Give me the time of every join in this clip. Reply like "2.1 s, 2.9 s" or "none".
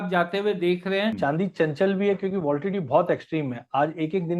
1.1 s